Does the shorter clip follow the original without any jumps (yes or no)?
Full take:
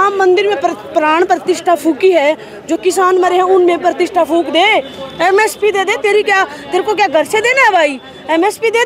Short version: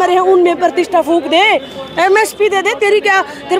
yes